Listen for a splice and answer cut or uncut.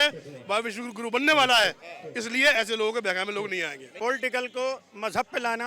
cut